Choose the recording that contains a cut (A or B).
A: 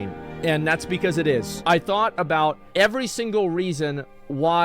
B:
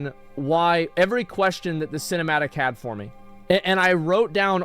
A